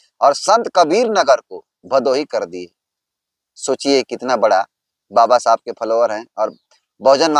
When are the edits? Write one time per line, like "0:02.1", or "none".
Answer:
none